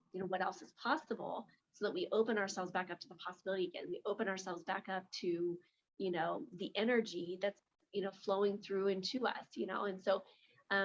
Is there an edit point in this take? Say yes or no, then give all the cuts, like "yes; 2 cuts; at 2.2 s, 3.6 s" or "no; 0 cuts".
no; 0 cuts